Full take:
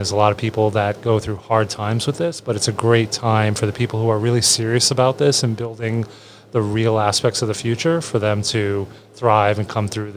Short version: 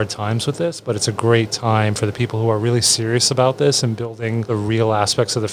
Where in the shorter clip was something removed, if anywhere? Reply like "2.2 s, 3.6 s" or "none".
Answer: 4.4 s